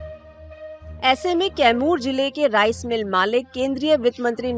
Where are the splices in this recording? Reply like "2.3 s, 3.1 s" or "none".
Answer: 0.9 s